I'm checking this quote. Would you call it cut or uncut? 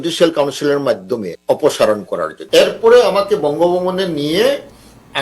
cut